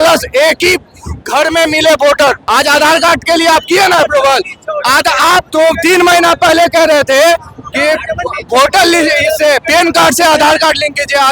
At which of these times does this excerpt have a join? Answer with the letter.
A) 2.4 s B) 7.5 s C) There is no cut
A